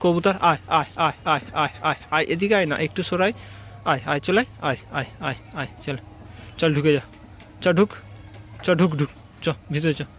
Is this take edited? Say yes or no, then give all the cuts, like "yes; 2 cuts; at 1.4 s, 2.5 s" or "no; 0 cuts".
no; 0 cuts